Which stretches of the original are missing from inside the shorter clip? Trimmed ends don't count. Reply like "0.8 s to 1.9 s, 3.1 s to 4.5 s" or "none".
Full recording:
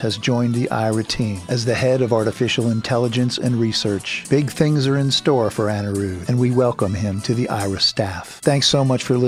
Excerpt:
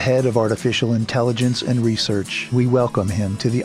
4.2 s to 6.2 s